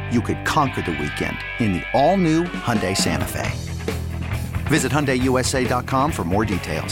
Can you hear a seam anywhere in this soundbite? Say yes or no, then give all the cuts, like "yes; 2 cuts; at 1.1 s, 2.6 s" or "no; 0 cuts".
no; 0 cuts